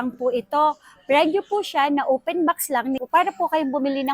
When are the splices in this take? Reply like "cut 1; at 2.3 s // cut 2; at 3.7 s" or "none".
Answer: cut 1; at 3.1 s